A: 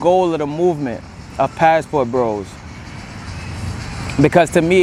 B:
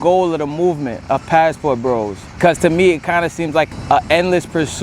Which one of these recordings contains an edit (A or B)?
B